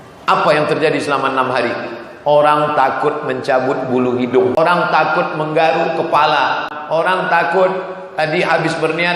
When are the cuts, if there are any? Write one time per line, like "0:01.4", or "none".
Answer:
0:04.5
0:06.7